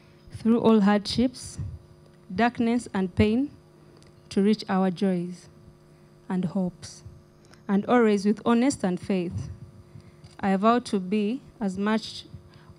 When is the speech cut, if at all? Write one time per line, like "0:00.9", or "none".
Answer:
none